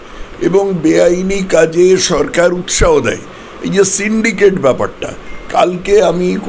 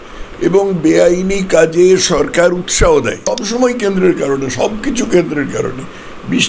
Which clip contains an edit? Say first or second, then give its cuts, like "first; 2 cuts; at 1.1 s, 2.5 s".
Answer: second; 1 cut; at 3.4 s